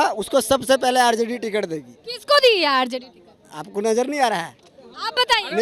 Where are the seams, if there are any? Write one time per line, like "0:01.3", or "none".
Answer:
none